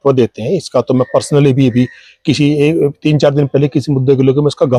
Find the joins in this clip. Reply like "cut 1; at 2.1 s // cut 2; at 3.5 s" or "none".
none